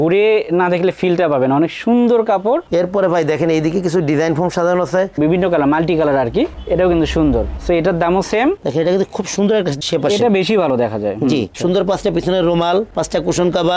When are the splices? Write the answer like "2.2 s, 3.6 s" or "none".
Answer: 2.7 s, 5.2 s, 8.6 s, 11.5 s